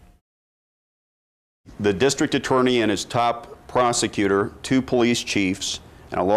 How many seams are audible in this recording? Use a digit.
1